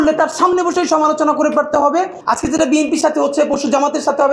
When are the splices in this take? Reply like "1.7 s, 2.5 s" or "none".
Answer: 2.2 s